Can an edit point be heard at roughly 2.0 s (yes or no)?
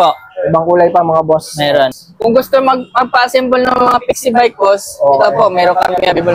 yes